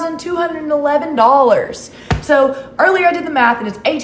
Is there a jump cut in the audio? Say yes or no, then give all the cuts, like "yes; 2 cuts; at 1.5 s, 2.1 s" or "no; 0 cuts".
no; 0 cuts